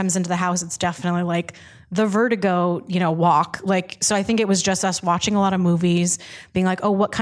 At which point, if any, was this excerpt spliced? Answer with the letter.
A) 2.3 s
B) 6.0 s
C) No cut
C